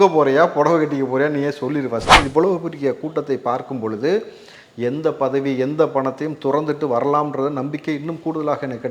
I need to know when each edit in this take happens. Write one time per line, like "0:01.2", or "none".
0:02.2

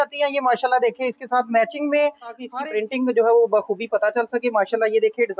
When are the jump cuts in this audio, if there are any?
0:02.4

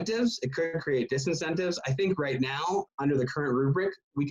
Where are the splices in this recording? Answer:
0:02.9

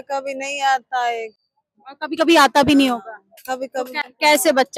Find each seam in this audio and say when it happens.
none

